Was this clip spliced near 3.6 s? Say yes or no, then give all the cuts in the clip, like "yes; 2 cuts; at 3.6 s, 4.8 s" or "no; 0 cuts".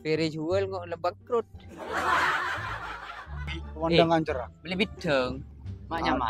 yes; 1 cut; at 3.6 s